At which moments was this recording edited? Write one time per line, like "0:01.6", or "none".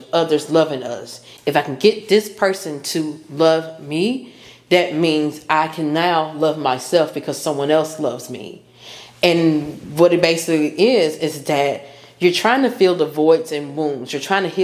none